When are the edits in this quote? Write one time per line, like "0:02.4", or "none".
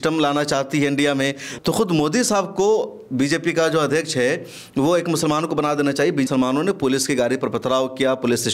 0:01.5
0:06.3